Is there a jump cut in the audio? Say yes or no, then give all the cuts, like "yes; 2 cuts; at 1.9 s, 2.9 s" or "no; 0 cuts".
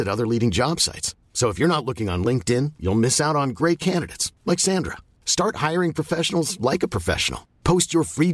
no; 0 cuts